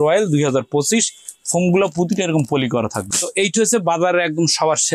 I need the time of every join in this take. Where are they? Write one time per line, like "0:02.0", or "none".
none